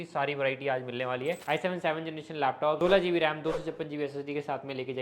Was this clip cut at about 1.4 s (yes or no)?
yes